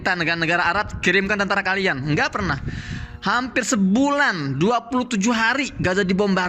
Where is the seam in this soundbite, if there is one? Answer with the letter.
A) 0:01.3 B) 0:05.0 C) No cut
C